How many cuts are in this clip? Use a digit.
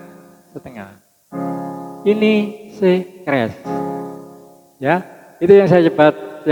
0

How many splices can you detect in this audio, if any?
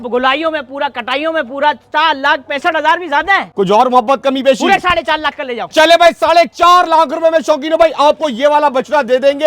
1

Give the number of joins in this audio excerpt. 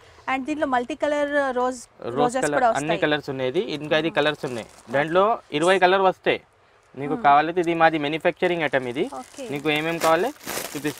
0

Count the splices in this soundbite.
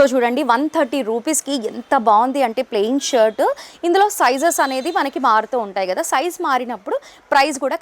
1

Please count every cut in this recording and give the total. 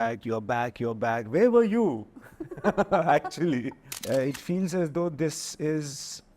1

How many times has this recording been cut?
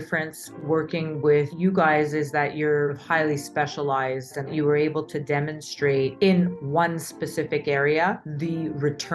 1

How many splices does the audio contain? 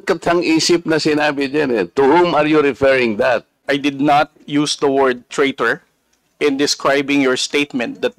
1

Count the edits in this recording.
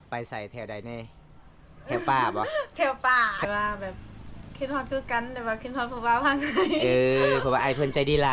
1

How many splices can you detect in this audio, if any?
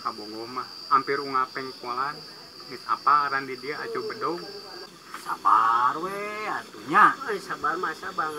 1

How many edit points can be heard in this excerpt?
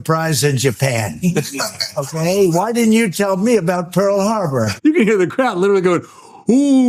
1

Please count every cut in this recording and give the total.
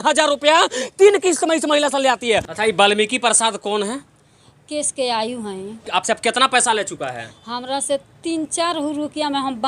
2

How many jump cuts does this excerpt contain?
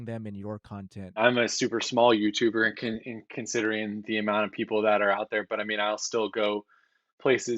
1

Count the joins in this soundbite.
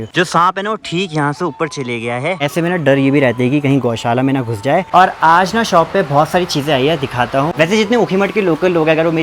3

